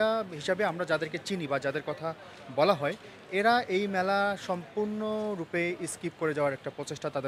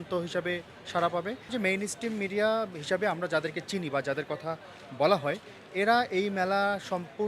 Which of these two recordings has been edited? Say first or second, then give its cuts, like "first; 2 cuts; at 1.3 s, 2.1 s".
second; 1 cut; at 1.5 s